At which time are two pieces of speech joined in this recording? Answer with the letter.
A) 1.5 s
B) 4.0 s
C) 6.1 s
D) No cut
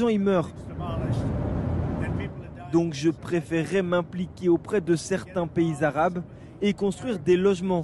A